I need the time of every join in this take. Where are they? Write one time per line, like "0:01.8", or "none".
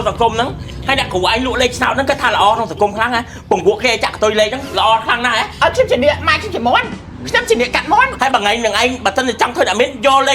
0:05.5
0:08.1